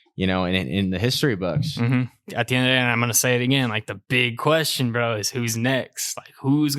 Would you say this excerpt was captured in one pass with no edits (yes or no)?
no